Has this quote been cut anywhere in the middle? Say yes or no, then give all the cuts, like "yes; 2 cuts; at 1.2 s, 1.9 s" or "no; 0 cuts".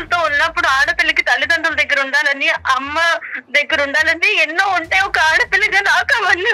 no; 0 cuts